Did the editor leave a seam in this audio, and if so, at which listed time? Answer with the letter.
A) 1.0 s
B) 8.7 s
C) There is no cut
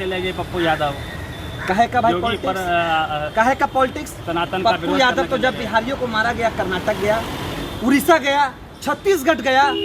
C